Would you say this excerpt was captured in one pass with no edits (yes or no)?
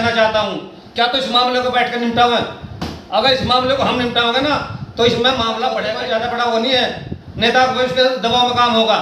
no